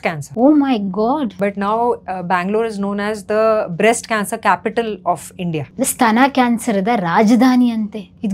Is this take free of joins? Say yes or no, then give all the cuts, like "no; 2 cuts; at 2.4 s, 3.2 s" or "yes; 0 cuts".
no; 2 cuts; at 1.3 s, 5.7 s